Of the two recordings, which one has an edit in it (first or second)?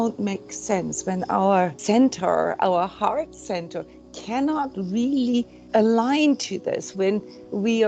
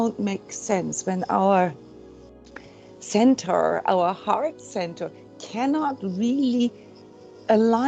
first